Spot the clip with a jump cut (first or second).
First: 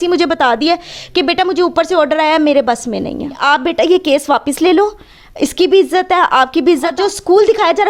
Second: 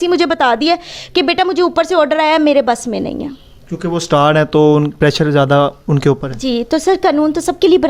first